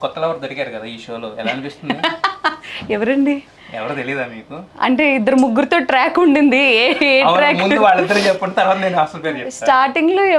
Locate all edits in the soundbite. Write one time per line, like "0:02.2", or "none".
none

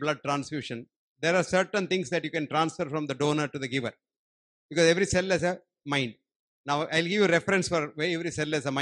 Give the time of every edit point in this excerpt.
none

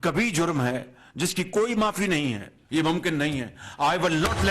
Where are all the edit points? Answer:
0:02.5

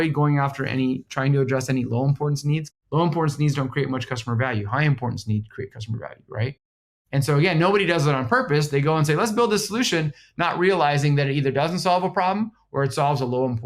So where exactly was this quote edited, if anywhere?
0:02.7

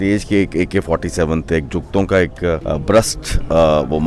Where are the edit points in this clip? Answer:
0:02.6

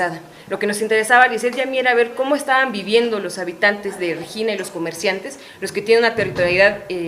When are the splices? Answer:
0:01.0

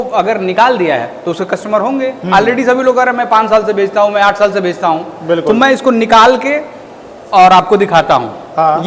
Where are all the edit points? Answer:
none

